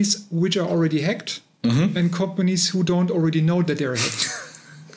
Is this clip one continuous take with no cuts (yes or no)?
yes